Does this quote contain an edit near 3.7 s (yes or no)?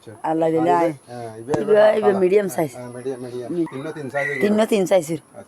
yes